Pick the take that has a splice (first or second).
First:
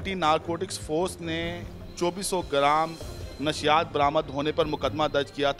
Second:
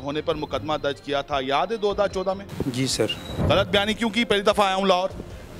second